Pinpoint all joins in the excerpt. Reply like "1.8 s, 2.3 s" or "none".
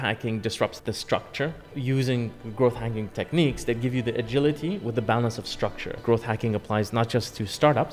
0.8 s, 1.7 s, 6.0 s